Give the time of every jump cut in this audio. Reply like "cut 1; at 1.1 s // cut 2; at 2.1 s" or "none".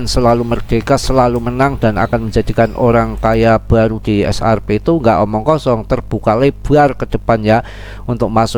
none